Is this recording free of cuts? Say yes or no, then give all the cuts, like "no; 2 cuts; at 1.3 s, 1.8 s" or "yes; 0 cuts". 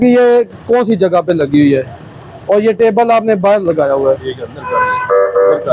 yes; 0 cuts